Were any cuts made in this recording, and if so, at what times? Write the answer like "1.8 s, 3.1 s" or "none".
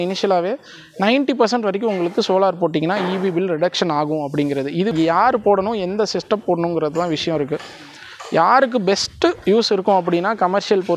4.9 s